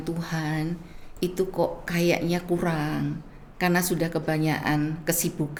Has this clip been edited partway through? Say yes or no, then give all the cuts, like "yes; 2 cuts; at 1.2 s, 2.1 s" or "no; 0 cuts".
no; 0 cuts